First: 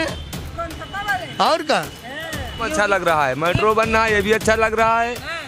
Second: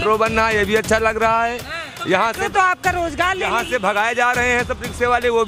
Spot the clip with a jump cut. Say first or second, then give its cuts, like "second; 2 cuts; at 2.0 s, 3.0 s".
first; 1 cut; at 2.6 s